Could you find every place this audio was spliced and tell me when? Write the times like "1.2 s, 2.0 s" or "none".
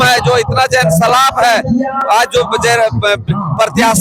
none